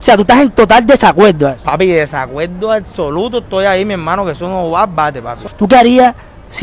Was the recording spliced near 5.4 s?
yes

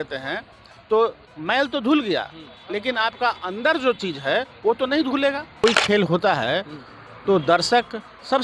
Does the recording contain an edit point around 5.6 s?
yes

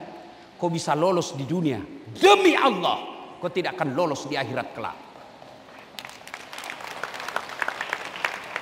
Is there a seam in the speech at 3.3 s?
no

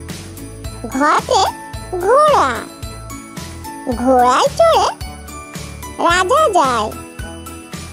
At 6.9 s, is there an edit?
yes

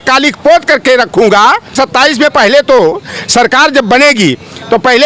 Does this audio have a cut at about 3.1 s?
no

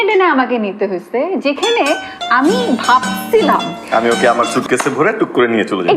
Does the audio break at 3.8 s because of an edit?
yes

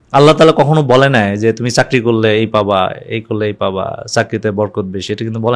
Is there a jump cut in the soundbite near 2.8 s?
no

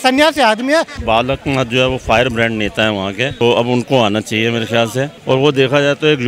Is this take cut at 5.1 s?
yes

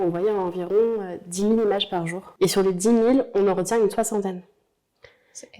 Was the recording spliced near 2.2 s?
yes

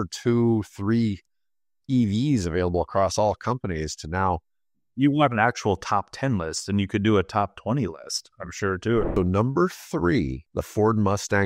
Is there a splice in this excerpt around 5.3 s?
no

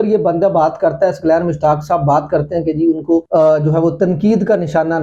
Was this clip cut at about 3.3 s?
yes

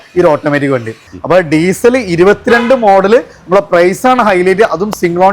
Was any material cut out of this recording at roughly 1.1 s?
yes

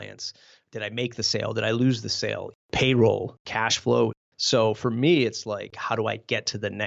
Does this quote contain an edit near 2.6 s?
yes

